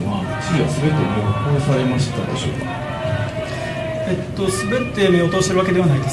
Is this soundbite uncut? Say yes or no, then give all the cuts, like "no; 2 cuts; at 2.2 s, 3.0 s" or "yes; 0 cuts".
yes; 0 cuts